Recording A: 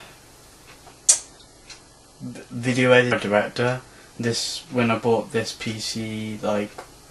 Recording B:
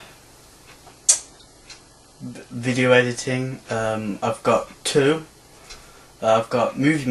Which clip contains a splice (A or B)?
B